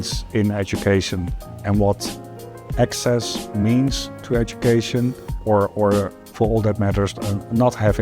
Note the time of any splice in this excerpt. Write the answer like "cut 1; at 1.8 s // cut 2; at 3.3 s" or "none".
cut 1; at 2.6 s // cut 2; at 5.3 s // cut 3; at 6.2 s